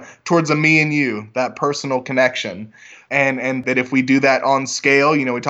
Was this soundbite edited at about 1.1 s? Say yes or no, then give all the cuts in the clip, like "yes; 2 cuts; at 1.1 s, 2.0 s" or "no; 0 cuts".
no; 1 cut; at 3.1 s